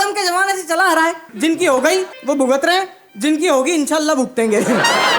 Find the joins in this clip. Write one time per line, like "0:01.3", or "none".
0:01.3
0:02.1
0:03.0

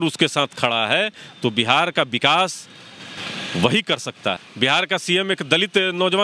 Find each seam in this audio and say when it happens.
0:04.4

